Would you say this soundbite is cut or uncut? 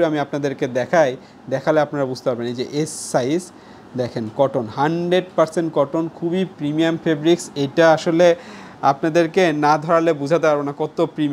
uncut